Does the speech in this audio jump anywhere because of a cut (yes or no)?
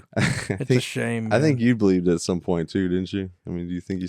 no